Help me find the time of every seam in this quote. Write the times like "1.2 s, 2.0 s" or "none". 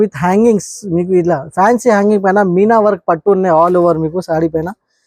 none